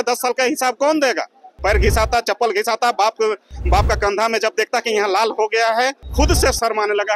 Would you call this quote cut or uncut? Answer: cut